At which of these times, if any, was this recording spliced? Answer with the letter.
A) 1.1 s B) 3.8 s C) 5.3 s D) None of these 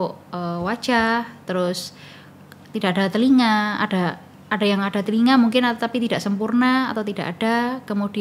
D